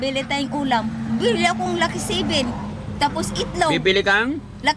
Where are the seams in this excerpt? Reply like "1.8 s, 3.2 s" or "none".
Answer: none